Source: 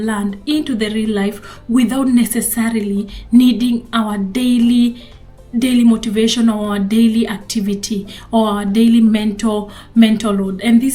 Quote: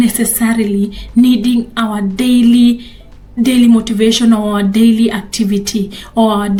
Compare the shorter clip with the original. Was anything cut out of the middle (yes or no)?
no